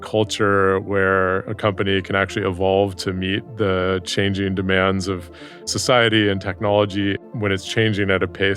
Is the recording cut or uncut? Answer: cut